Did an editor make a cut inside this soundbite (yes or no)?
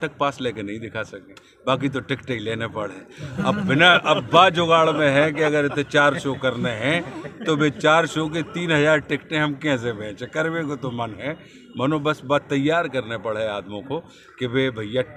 no